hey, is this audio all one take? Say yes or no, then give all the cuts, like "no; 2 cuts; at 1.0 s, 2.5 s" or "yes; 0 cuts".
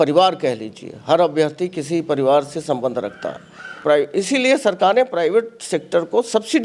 no; 1 cut; at 3.7 s